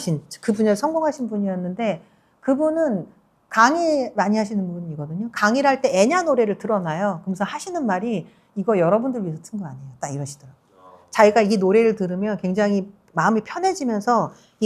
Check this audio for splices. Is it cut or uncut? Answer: uncut